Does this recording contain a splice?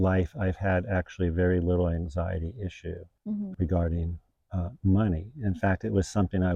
no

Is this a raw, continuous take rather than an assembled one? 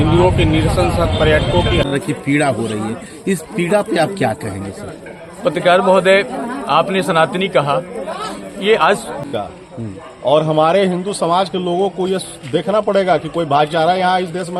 no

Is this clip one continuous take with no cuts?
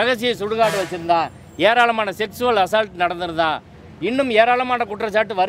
yes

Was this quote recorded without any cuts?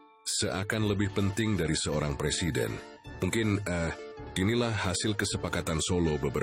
yes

